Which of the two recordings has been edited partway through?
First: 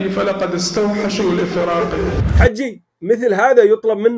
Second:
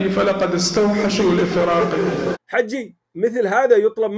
first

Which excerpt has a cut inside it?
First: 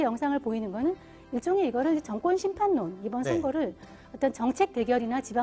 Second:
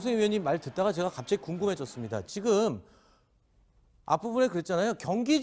second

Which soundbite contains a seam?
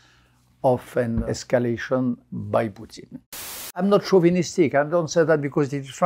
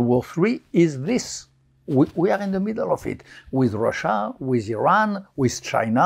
first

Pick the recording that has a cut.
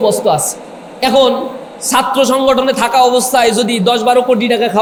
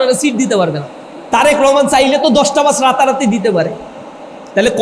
second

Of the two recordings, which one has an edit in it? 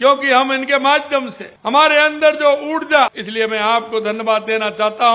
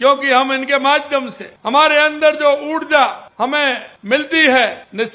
first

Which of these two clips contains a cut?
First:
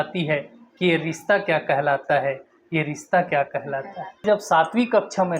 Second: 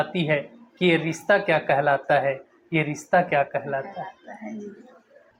first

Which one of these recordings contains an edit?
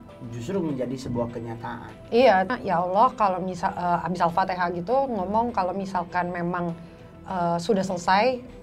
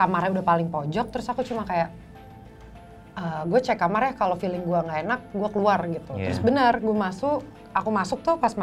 first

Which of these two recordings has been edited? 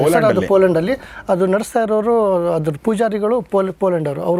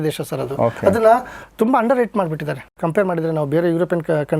second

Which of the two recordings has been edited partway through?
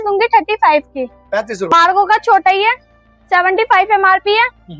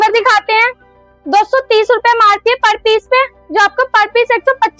first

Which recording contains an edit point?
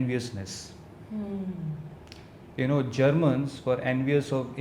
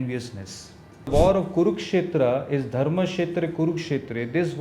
second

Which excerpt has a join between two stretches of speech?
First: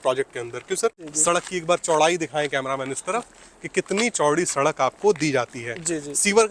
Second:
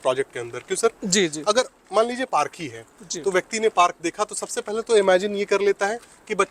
first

